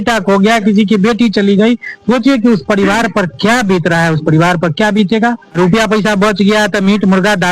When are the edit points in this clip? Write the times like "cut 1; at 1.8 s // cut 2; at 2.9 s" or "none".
cut 1; at 5.6 s